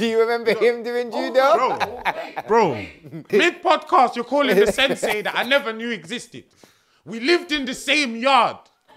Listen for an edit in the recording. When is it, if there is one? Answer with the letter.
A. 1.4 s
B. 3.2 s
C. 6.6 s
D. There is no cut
B